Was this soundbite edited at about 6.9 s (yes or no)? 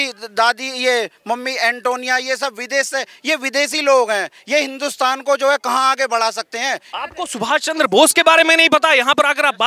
yes